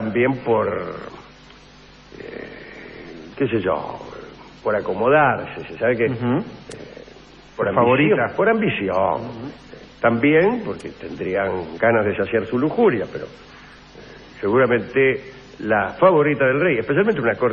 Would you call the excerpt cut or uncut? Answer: uncut